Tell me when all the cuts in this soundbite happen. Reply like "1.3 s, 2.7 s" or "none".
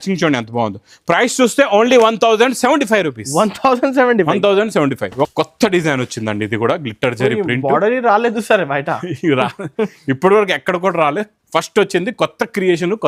5.3 s